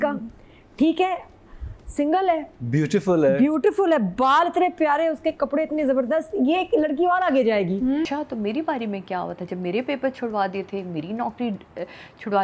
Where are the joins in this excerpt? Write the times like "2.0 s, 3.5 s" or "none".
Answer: 8.0 s